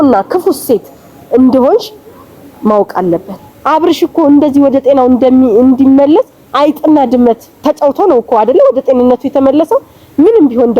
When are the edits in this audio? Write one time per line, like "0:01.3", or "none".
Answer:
0:03.5